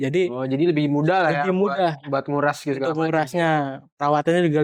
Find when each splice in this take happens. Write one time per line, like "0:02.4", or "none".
none